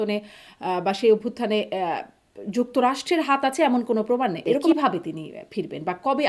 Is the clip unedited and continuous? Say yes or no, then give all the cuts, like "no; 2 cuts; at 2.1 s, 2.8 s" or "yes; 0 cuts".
no; 1 cut; at 4.6 s